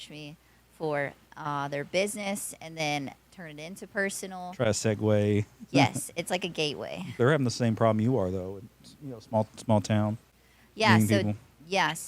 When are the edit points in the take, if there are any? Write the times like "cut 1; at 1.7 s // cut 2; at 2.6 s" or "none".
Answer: cut 1; at 7.1 s

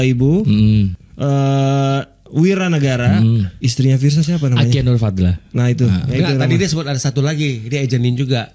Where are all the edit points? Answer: cut 1; at 1.0 s // cut 2; at 3.6 s

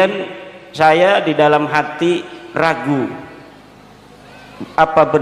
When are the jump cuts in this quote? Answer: none

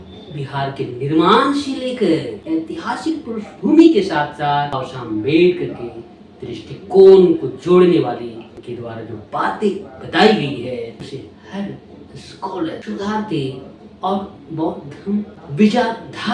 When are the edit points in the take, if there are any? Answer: cut 1; at 2.4 s // cut 2; at 4.9 s // cut 3; at 8.6 s // cut 4; at 11.1 s // cut 5; at 12.8 s

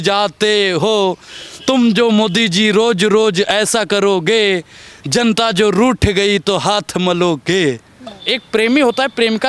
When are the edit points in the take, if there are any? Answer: cut 1; at 8.3 s

